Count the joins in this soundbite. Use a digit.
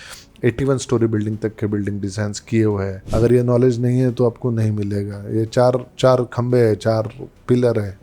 1